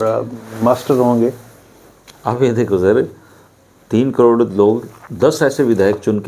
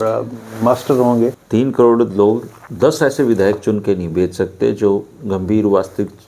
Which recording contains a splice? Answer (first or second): second